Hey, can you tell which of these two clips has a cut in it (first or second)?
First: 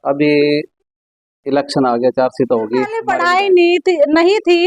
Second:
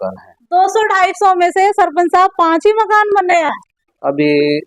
first